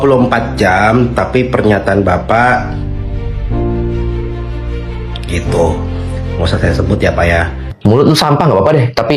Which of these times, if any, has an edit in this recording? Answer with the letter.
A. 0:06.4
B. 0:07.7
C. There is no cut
B